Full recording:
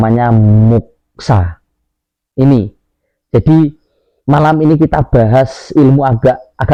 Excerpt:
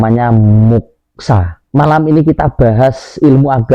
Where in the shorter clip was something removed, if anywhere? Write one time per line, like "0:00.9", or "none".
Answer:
0:01.5